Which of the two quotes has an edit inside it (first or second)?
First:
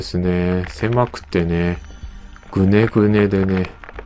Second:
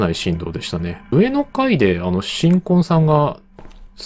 second